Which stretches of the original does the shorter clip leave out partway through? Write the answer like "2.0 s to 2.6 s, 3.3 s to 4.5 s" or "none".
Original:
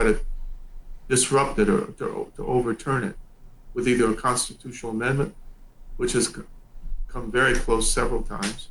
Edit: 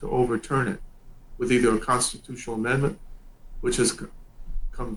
none